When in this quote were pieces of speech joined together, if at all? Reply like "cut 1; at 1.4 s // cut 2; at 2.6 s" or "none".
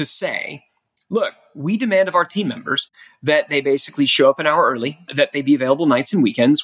none